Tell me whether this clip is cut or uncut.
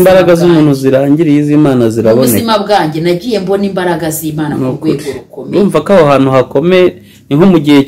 uncut